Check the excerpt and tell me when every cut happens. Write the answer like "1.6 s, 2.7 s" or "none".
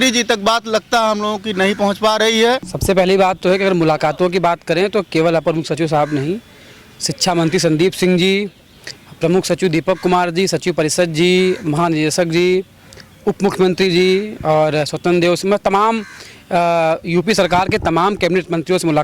2.7 s

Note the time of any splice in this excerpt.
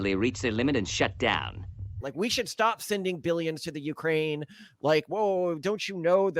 1.9 s

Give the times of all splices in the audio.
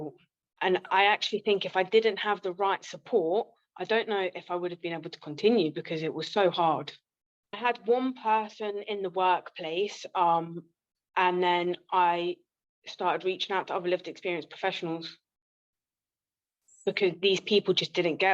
7.4 s

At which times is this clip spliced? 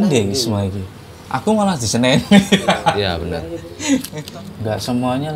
4.2 s

